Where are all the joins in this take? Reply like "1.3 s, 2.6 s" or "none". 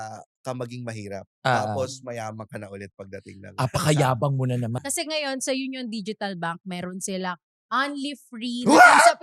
4.7 s